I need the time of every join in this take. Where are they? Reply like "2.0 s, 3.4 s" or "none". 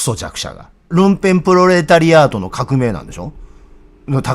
0.9 s